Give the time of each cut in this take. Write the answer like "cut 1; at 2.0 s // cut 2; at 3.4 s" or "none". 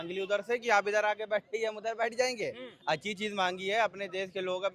none